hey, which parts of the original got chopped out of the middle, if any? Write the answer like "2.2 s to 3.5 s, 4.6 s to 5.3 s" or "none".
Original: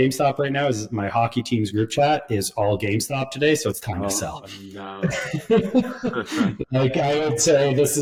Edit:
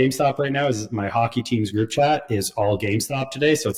none

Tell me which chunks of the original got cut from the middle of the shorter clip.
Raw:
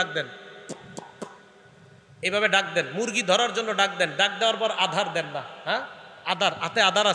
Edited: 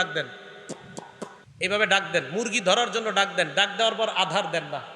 1.4 s to 2.0 s

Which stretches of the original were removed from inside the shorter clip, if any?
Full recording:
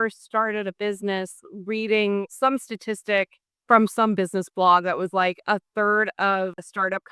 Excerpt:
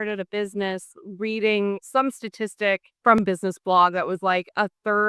3.7 s to 4.1 s

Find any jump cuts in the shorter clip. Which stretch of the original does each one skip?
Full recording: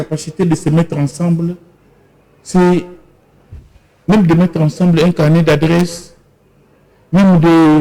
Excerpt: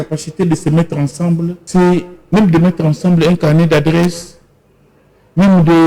1.6 s to 2.4 s, 3.0 s to 3.9 s

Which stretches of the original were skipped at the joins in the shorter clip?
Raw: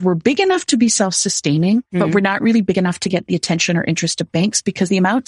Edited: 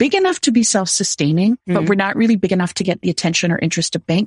none

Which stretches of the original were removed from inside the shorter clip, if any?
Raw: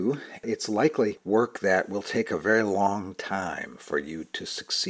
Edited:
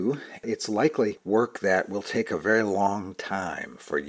none

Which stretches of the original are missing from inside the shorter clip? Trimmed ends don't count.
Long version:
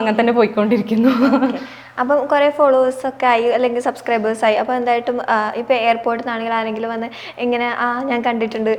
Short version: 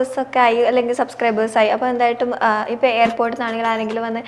none

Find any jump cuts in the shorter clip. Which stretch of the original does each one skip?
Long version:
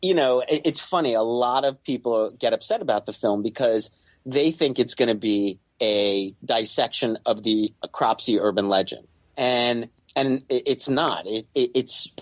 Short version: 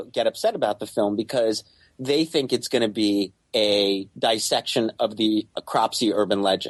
none

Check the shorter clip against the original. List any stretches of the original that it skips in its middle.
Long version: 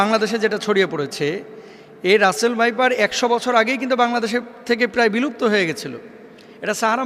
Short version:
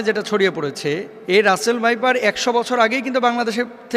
1.5 s to 1.9 s

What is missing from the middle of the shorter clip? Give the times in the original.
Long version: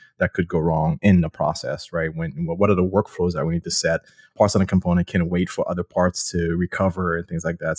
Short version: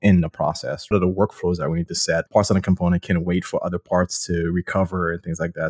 1.9 s to 2.7 s, 4.0 s to 4.3 s

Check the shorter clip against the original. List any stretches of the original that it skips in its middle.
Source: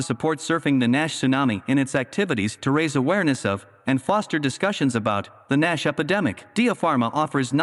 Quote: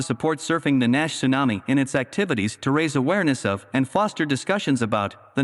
3.6 s to 3.8 s

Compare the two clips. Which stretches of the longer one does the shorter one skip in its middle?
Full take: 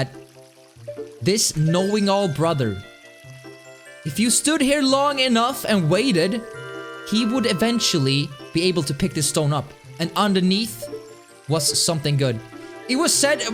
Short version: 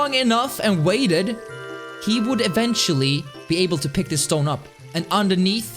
none

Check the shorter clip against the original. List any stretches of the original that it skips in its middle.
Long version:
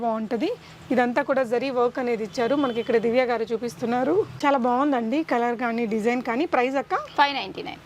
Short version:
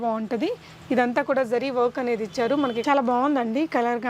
2.8 s to 4.4 s

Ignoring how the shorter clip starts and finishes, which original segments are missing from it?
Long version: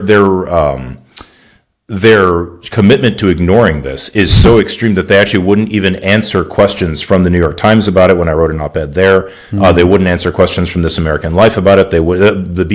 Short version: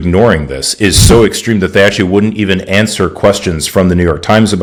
none

